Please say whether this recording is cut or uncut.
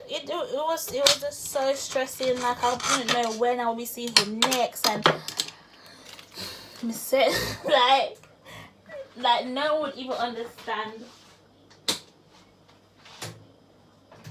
uncut